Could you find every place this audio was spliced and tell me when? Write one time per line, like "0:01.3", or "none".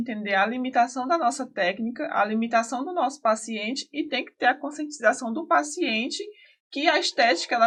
none